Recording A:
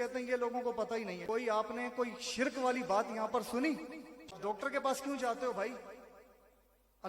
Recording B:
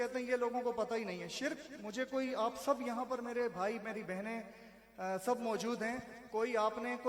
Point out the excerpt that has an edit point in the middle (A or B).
A